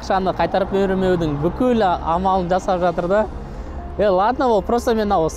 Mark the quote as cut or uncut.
uncut